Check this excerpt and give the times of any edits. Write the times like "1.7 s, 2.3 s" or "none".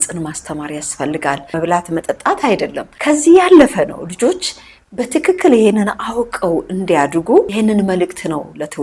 1.5 s, 2.9 s, 7.5 s